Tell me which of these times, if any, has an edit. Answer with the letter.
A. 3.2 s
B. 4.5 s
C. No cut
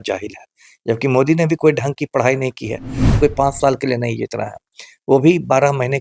A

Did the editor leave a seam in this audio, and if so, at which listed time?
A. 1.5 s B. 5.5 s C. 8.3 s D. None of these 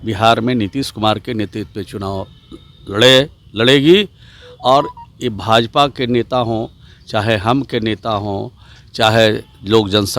D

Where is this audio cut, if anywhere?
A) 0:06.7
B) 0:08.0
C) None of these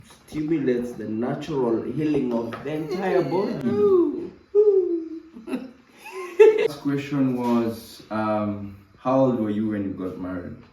A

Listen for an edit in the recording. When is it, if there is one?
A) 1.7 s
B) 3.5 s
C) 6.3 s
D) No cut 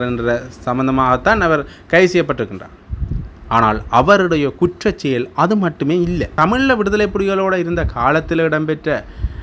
C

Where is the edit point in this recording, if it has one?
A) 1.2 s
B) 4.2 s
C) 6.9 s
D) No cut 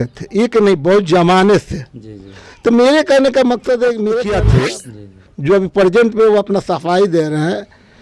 B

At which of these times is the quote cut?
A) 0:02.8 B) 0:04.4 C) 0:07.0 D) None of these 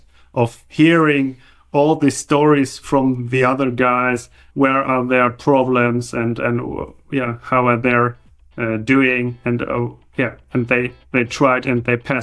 B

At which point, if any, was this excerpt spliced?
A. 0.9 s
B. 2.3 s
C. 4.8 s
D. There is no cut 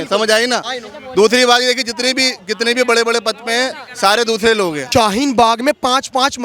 C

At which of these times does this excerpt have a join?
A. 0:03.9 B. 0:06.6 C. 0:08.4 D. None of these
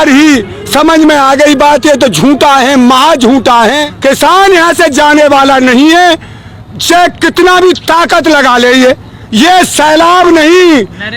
A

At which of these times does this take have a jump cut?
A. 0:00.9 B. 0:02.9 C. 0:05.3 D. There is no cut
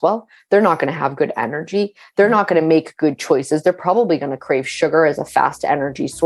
D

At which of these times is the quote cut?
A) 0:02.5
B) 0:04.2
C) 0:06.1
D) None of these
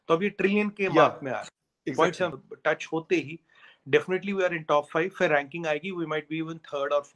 A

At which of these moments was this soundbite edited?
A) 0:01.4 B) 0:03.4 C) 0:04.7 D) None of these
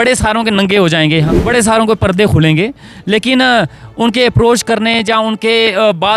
A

